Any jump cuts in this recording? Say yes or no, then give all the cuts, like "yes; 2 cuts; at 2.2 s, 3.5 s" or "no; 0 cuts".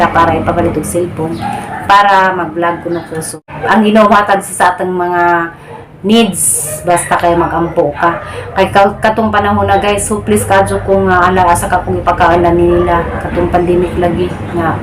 yes; 1 cut; at 3.5 s